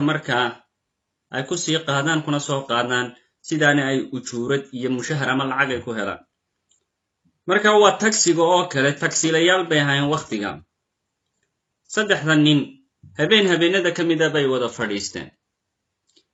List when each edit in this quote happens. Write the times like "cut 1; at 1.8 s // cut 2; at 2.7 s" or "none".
none